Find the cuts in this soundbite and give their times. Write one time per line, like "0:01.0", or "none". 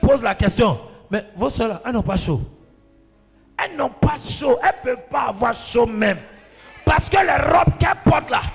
none